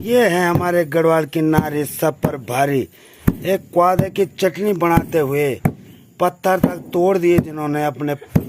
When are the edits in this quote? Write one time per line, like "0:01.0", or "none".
none